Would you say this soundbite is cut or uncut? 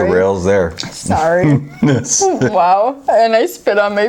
uncut